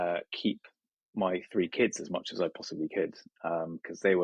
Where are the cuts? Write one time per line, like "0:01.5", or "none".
none